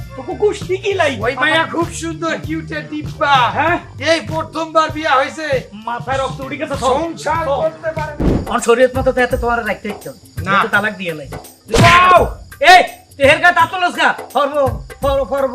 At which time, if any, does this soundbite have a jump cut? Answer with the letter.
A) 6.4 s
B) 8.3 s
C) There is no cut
B